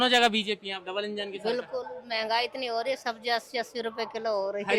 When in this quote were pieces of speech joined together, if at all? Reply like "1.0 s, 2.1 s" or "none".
none